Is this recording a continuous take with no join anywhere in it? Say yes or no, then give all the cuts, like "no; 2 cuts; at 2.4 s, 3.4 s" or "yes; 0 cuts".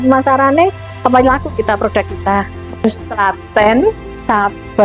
no; 1 cut; at 2.8 s